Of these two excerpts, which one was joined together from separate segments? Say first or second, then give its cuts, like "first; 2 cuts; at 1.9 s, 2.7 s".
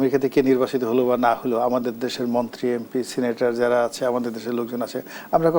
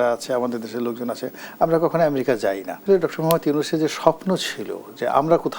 second; 1 cut; at 2.8 s